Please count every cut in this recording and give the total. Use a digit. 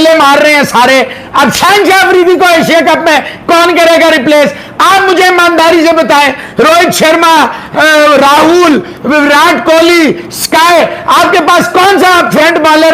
0